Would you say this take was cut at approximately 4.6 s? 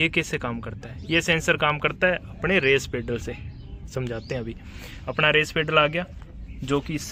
no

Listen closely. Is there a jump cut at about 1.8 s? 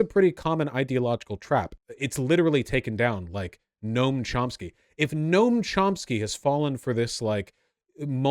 yes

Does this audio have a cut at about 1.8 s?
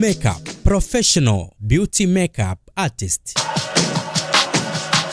no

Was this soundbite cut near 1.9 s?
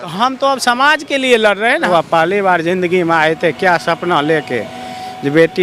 yes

